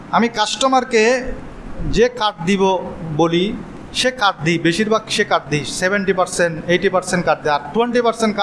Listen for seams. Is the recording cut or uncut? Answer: uncut